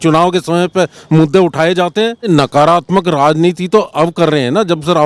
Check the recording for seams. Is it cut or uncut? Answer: cut